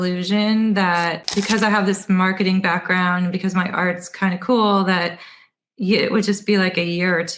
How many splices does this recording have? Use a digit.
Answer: 1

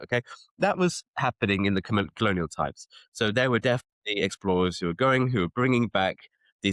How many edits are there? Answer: 0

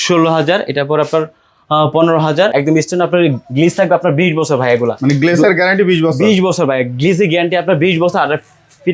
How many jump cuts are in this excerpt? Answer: 1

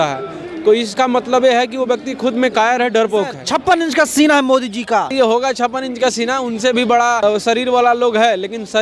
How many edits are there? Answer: 3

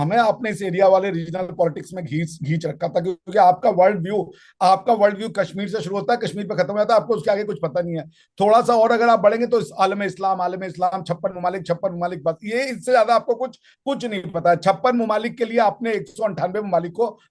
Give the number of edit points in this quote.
0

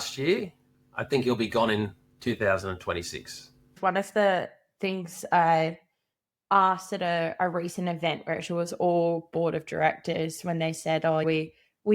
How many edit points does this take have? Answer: 1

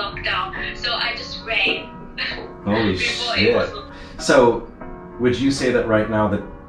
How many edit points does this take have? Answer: 1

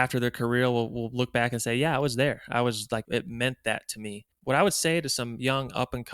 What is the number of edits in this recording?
2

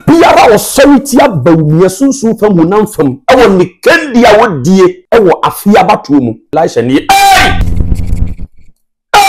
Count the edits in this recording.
3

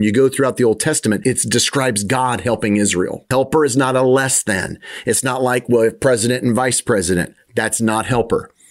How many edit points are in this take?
2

